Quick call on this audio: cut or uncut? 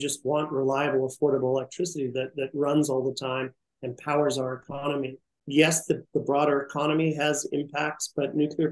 cut